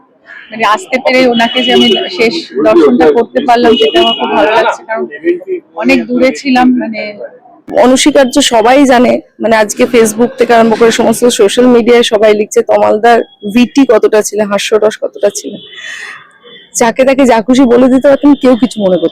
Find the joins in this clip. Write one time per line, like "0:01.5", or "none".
0:07.7